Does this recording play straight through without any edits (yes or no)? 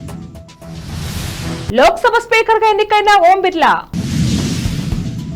no